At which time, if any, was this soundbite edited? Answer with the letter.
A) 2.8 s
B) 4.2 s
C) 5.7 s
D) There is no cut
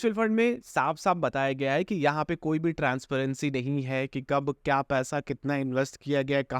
D